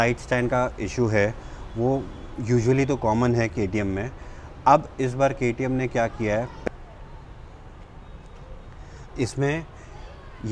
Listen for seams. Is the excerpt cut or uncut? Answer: cut